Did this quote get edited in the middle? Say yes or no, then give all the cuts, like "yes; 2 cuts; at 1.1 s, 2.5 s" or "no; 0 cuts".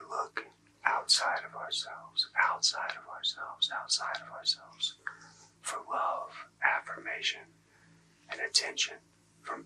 no; 0 cuts